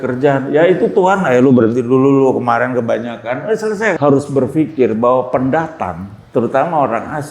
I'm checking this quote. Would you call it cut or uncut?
cut